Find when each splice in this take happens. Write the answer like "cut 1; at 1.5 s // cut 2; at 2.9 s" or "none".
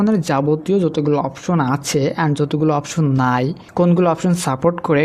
none